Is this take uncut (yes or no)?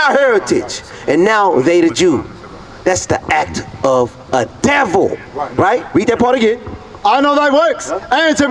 no